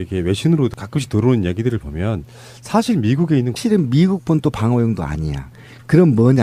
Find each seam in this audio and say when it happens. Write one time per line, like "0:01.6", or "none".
none